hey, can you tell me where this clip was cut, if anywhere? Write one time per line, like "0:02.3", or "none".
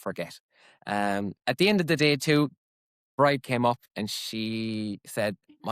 0:01.3
0:03.0